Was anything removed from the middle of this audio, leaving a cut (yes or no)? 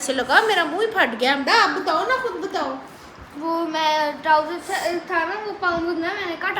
no